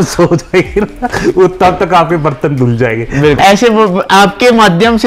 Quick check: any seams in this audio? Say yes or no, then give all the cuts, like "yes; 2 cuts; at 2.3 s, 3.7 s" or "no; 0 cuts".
yes; 1 cut; at 3.4 s